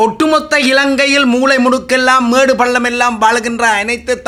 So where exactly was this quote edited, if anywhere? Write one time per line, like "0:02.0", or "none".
none